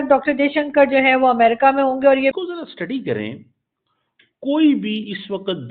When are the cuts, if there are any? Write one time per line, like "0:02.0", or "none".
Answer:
0:02.4